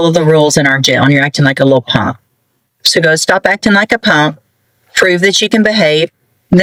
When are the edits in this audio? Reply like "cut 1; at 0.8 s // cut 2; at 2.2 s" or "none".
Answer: none